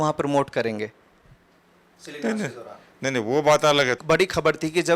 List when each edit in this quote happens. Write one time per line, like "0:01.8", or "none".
0:04.0